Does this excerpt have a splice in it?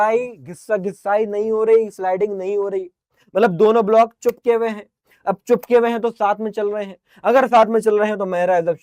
no; 0 cuts

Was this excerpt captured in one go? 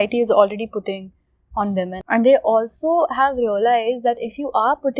no; 1 cut; at 2.0 s

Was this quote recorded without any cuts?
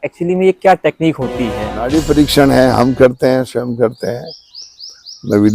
no; 1 cut; at 1.8 s

